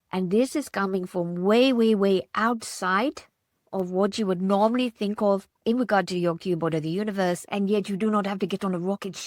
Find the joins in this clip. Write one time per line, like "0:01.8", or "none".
0:05.5
0:07.4